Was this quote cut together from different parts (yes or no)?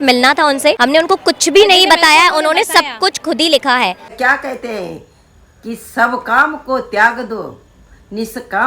yes